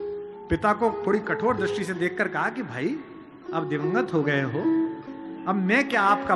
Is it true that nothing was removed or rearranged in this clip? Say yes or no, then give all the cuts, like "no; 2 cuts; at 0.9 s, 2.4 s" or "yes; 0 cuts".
yes; 0 cuts